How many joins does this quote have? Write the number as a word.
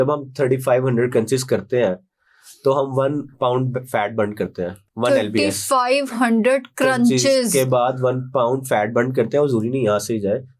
zero